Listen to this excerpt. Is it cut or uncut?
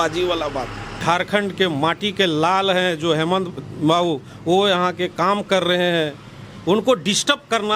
cut